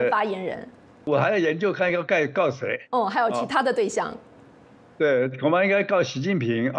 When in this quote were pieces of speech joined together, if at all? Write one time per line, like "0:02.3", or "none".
0:01.1